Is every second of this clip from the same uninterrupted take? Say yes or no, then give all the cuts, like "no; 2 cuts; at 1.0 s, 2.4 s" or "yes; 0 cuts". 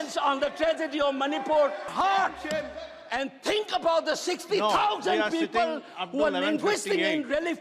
no; 1 cut; at 1.9 s